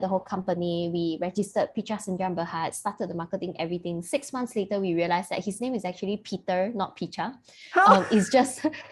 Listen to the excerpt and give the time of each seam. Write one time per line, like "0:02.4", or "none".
none